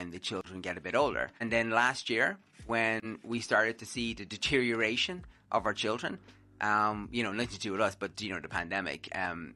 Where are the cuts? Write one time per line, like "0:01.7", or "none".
0:01.4

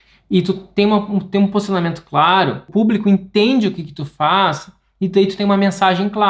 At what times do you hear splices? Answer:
0:02.7

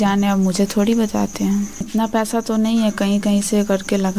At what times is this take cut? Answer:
0:01.8

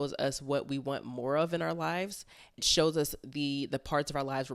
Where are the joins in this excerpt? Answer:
0:02.6

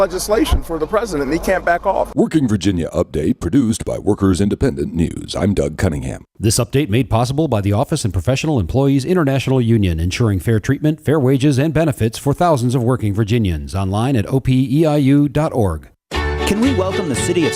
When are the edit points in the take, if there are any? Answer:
0:15.8

